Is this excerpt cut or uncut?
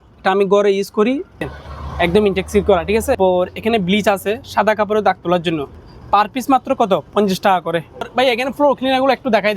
cut